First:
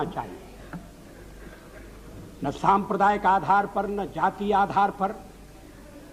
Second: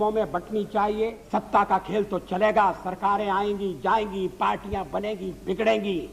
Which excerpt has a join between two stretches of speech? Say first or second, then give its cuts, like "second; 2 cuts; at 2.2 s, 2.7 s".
second; 1 cut; at 1.2 s